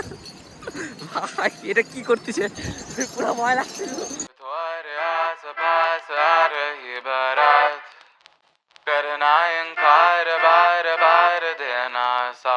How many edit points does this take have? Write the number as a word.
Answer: one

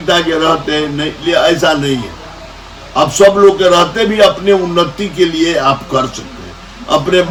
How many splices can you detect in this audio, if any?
zero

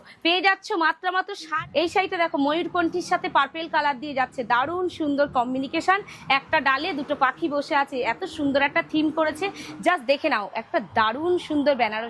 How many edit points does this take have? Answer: two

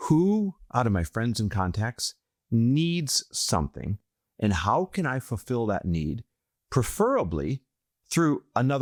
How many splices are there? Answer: zero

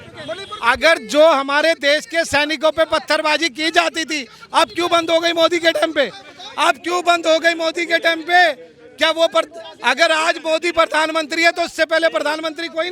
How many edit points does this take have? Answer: zero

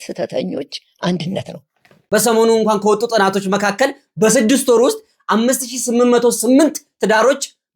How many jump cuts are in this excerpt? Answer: one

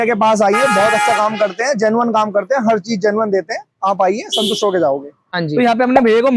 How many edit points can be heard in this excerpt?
one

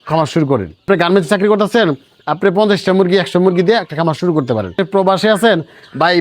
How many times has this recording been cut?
two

